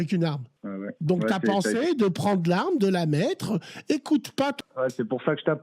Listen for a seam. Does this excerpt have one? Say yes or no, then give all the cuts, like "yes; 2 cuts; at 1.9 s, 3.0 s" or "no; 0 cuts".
yes; 1 cut; at 4.6 s